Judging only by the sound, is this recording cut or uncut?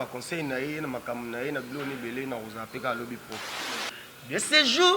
cut